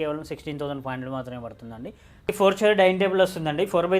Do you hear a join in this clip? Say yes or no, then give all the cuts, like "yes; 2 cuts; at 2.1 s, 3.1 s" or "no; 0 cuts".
yes; 1 cut; at 2.3 s